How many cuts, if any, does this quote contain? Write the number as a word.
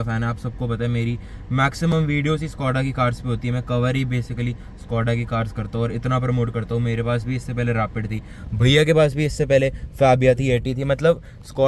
zero